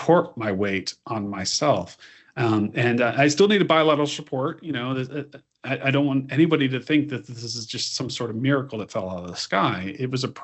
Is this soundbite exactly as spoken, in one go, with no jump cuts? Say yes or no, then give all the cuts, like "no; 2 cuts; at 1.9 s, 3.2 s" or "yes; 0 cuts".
yes; 0 cuts